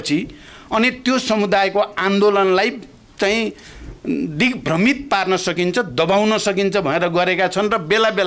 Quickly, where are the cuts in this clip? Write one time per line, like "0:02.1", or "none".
none